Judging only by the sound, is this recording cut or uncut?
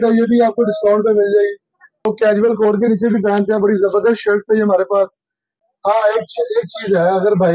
cut